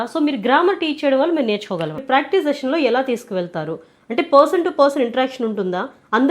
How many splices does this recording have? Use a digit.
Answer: 1